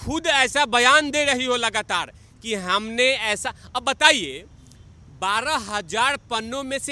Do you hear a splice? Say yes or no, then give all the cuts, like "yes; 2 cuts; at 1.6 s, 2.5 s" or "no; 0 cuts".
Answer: no; 0 cuts